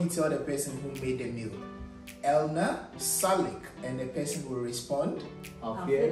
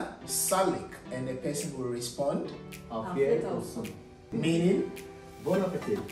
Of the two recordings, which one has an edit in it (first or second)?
second